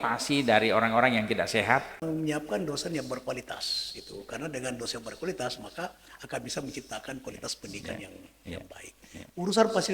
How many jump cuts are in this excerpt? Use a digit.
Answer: 1